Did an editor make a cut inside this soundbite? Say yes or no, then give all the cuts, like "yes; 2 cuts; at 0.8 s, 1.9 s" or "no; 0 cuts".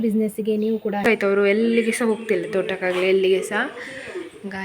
yes; 1 cut; at 1.1 s